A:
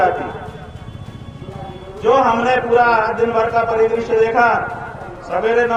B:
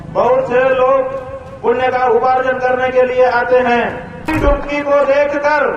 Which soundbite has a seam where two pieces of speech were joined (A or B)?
B